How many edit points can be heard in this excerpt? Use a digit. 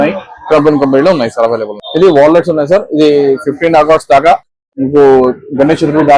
1